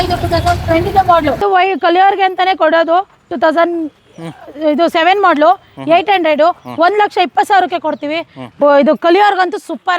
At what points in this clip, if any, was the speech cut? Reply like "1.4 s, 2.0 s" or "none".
1.4 s, 8.4 s